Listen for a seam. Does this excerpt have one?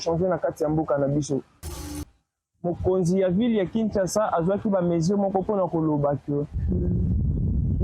yes; 1 cut; at 1.9 s

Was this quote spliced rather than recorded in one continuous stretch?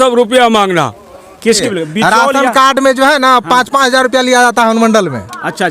yes; 1 cut; at 1.6 s

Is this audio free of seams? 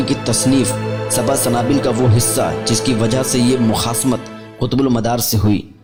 yes; 0 cuts

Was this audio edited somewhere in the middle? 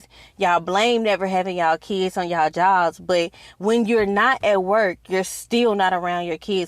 no; 0 cuts

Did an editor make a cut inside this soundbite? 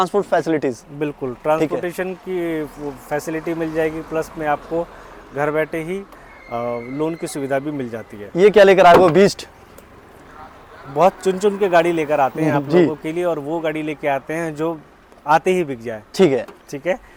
no; 0 cuts

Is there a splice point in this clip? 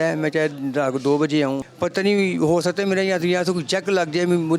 yes; 1 cut; at 1.6 s

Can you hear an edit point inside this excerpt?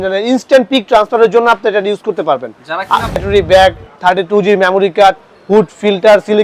yes; 1 cut; at 3.2 s

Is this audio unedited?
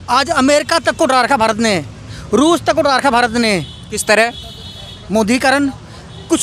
yes; 0 cuts

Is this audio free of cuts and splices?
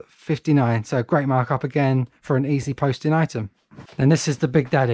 yes; 0 cuts

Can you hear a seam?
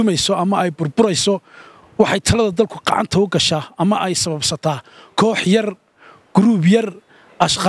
no; 0 cuts

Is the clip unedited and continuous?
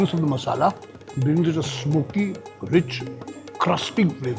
yes; 0 cuts

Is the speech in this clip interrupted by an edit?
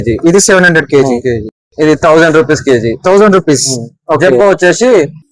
no; 0 cuts

